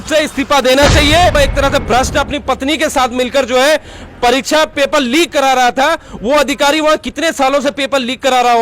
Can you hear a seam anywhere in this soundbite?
yes; 1 cut; at 1.3 s

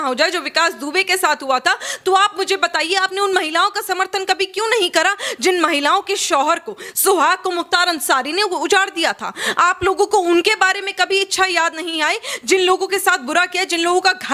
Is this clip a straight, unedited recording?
yes; 0 cuts

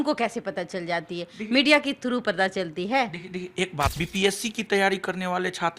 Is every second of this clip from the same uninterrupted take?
no; 1 cut; at 4.0 s

